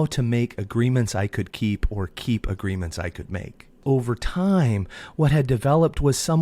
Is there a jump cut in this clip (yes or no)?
yes